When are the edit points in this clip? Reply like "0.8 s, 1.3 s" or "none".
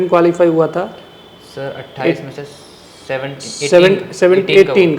none